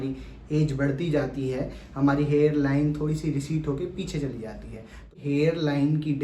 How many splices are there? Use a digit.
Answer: 1